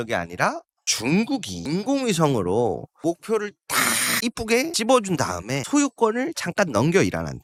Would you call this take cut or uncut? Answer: uncut